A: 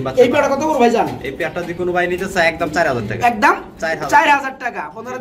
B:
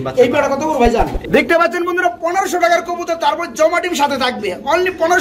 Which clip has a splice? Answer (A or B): B